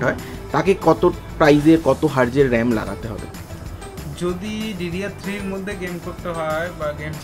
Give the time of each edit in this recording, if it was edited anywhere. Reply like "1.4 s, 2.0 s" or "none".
none